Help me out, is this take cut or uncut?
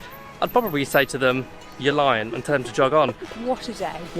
cut